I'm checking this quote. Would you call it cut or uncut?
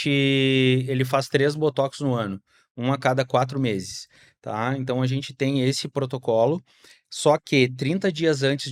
uncut